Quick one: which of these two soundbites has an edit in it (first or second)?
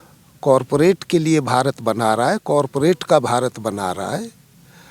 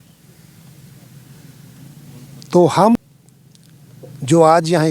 second